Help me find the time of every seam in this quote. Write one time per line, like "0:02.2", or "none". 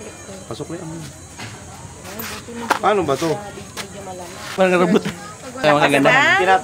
0:04.4
0:05.6